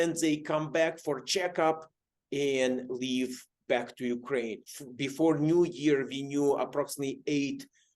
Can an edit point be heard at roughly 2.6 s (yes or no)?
no